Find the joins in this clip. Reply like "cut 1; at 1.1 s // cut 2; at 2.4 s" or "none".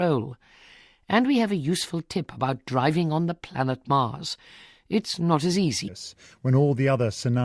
none